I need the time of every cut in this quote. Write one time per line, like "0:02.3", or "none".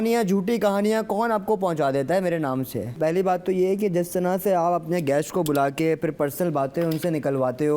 0:02.9